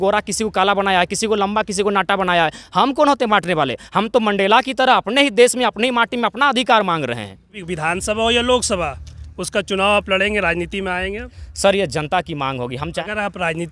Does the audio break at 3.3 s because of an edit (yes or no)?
no